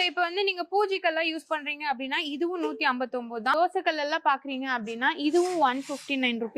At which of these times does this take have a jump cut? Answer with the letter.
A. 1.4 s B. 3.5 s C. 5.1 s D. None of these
B